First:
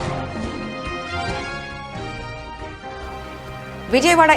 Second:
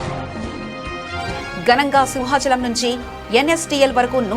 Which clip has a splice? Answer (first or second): second